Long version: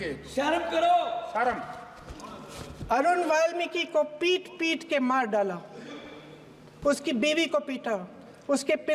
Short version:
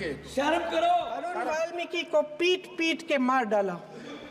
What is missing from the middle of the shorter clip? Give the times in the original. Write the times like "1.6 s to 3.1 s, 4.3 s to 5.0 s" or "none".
1.4 s to 3.2 s